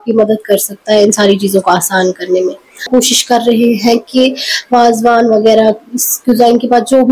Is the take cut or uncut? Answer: cut